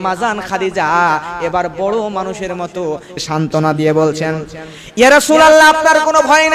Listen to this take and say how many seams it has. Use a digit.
1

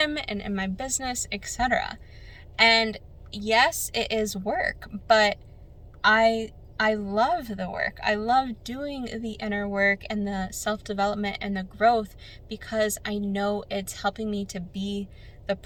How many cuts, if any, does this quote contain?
0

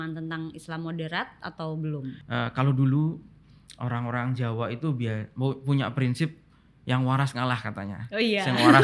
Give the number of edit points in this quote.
1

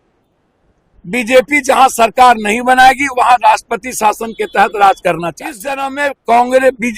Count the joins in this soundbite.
1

